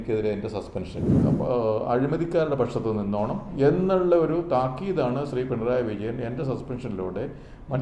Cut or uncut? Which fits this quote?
cut